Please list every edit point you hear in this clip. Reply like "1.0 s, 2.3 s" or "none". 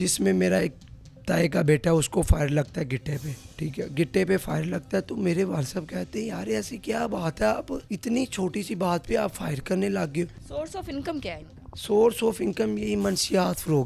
3.4 s, 7.8 s, 10.4 s